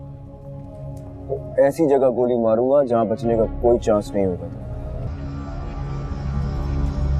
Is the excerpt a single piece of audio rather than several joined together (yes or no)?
no